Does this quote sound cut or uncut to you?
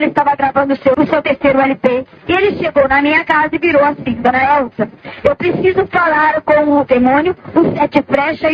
cut